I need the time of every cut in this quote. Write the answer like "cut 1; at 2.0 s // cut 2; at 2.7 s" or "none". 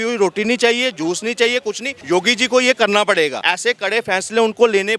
cut 1; at 1.9 s // cut 2; at 3.5 s